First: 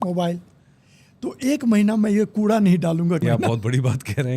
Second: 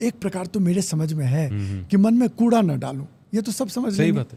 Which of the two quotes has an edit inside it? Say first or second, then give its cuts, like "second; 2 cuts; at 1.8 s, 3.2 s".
first; 1 cut; at 3.2 s